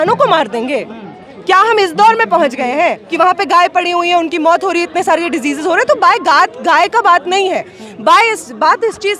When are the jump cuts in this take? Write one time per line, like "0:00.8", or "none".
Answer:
0:03.0